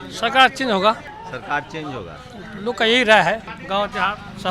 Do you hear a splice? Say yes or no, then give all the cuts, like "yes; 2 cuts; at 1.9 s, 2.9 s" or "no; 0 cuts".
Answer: yes; 2 cuts; at 1.1 s, 3.5 s